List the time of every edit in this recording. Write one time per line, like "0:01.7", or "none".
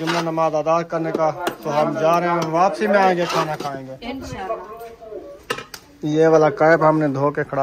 none